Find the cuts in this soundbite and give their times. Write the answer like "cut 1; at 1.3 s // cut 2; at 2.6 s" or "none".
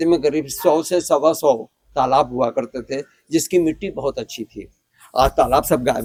none